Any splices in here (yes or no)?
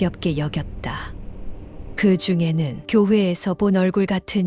no